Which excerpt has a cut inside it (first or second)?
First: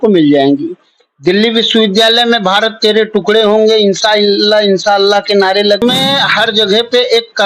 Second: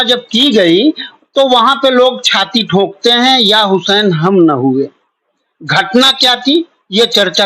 first